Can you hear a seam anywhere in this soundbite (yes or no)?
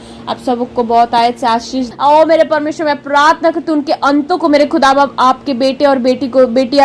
yes